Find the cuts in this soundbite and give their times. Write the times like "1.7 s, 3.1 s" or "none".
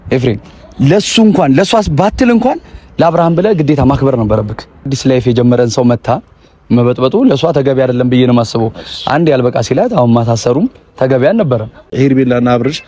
4.9 s, 11.9 s